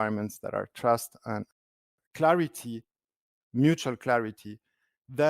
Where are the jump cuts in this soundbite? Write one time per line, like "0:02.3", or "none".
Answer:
0:01.7